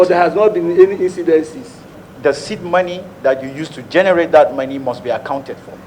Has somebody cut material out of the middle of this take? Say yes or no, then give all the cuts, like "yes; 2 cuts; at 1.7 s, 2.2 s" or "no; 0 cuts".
yes; 1 cut; at 1.9 s